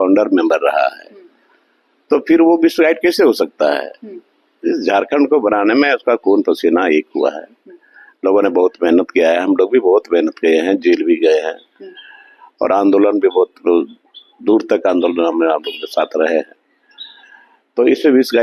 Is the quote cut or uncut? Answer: uncut